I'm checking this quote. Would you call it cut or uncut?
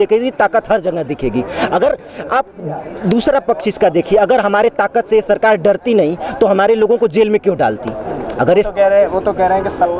uncut